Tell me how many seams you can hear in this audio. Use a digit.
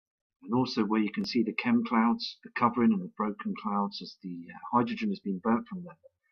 1